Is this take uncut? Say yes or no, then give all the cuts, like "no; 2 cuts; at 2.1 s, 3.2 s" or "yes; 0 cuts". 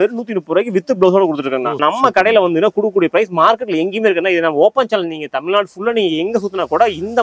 no; 1 cut; at 1.8 s